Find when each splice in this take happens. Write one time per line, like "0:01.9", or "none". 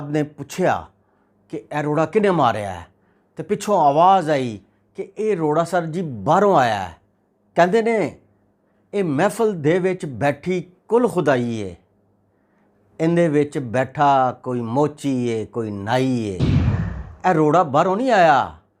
0:06.8